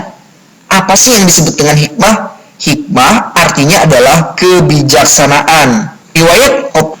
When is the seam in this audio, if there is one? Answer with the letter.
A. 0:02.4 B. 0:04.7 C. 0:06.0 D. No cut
C